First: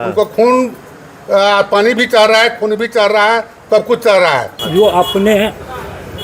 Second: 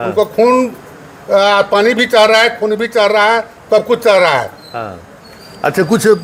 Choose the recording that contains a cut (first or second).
first